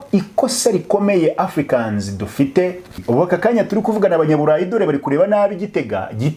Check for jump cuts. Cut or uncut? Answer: cut